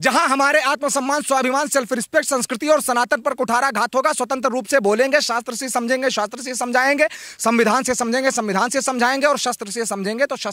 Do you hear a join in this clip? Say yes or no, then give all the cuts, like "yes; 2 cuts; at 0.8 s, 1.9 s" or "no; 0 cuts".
no; 0 cuts